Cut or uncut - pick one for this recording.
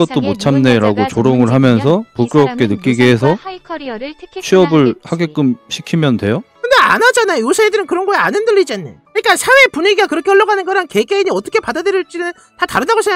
uncut